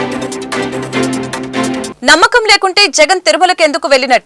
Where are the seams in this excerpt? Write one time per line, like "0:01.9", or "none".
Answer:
0:01.9